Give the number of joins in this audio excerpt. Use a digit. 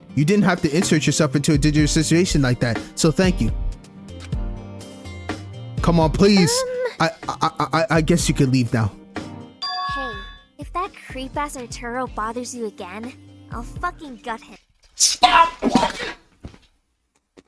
1